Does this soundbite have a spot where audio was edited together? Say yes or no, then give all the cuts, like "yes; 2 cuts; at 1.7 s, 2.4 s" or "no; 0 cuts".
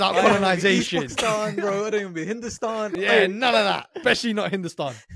yes; 2 cuts; at 3.0 s, 3.9 s